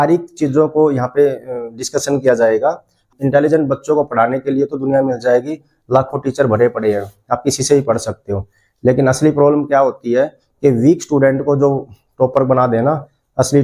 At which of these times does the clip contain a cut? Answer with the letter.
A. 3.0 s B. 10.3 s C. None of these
A